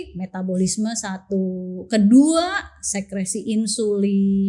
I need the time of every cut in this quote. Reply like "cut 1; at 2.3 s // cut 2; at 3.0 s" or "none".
none